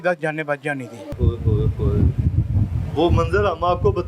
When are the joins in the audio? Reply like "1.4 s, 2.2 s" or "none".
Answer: 1.2 s